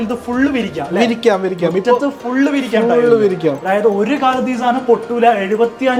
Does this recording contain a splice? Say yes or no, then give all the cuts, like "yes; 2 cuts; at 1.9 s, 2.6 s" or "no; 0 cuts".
no; 0 cuts